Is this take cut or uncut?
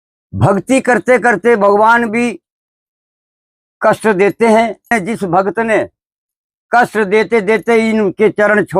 cut